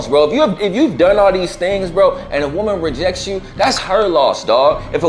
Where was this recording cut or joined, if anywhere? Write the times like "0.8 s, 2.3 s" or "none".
none